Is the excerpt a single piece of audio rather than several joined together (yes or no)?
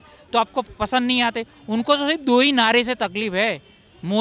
yes